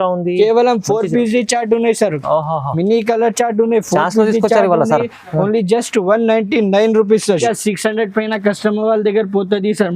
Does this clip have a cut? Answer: yes; 1 cut; at 7.4 s

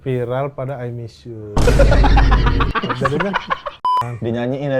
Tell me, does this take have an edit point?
yes; 1 cut; at 3.8 s

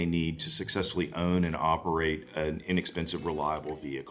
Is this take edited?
no; 0 cuts

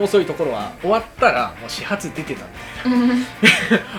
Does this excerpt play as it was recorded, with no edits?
yes; 0 cuts

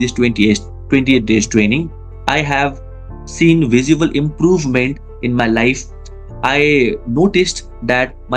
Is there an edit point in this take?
yes; 1 cut; at 2.1 s

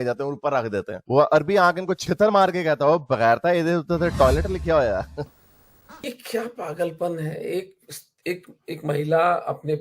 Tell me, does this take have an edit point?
yes; 1 cut; at 5.4 s

